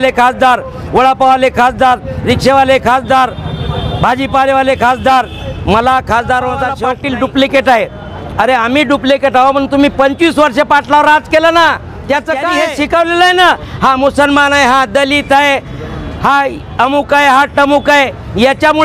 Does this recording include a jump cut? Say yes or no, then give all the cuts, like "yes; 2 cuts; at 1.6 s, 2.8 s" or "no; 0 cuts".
yes; 2 cuts; at 6.9 s, 12.5 s